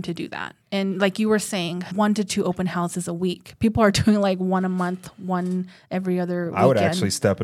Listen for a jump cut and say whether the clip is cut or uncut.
cut